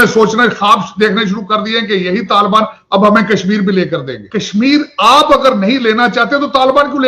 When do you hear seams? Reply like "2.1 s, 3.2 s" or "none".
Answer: 4.2 s